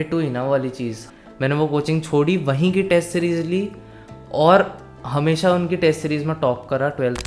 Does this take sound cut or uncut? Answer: cut